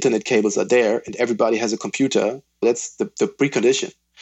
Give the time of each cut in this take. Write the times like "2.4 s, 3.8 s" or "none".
2.6 s